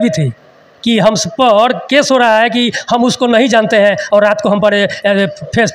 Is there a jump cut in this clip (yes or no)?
no